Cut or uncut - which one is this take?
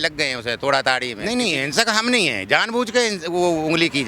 cut